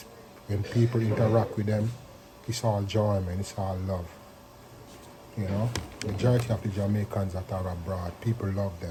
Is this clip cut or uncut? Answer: uncut